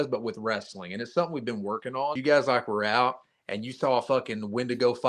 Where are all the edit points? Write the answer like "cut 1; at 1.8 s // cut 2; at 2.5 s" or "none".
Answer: cut 1; at 2.2 s